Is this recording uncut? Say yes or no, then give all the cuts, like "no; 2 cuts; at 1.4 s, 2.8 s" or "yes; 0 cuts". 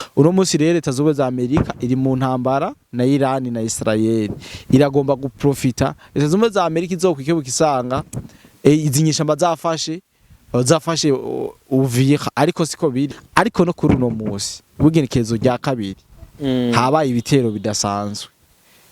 no; 1 cut; at 13.2 s